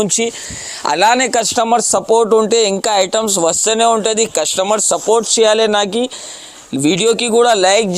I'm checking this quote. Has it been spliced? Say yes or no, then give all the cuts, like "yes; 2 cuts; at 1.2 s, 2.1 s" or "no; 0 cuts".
no; 0 cuts